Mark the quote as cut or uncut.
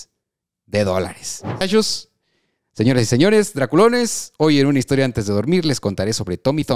cut